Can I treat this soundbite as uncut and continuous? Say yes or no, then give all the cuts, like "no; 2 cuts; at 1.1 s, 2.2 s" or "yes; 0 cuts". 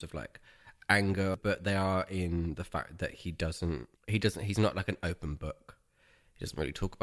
no; 2 cuts; at 1.4 s, 3.9 s